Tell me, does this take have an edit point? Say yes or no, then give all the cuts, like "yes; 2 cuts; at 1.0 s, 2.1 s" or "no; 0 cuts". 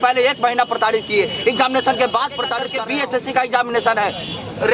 yes; 1 cut; at 2.6 s